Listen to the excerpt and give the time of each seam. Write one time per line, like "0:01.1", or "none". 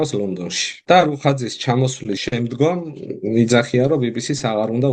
0:00.8
0:02.2